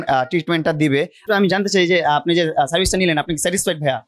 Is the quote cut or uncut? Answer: cut